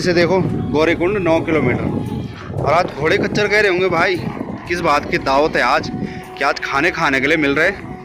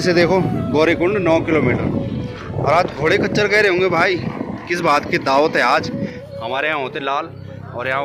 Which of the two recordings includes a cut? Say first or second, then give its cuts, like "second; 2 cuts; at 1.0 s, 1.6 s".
second; 1 cut; at 6.2 s